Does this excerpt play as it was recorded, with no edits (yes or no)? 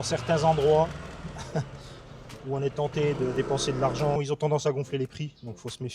no